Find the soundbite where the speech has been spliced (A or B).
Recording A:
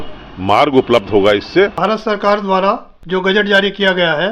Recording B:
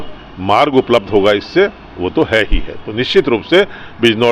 A